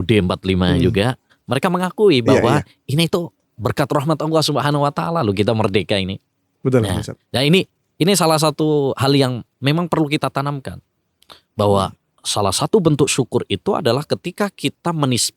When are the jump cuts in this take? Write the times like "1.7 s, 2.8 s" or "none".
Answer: 12.2 s